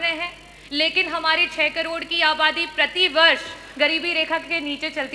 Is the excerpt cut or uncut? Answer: uncut